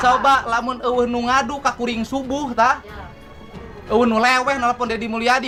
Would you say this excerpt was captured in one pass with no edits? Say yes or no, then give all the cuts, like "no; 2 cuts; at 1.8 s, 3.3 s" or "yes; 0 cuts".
yes; 0 cuts